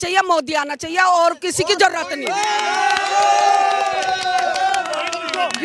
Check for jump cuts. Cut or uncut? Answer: uncut